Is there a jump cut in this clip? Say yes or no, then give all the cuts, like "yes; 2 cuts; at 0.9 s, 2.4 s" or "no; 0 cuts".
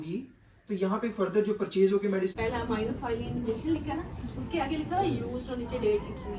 yes; 1 cut; at 2.3 s